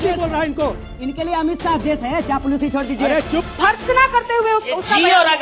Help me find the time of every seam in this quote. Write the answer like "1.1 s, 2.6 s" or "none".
3.4 s